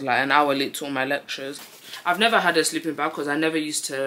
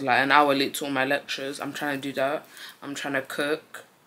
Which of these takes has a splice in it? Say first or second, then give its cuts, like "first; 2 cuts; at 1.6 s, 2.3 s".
first; 1 cut; at 1.6 s